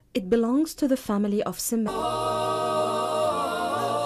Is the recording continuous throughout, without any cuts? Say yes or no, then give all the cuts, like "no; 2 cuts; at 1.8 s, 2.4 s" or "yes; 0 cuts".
yes; 0 cuts